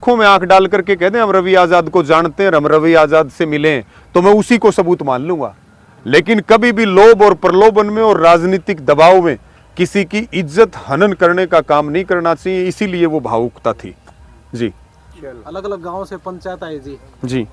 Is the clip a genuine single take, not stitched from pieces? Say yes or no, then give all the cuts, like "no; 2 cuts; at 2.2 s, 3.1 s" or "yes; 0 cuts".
yes; 0 cuts